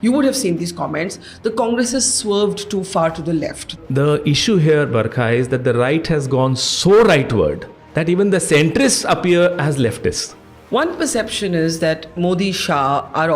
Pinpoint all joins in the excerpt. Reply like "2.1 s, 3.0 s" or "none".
3.8 s, 10.3 s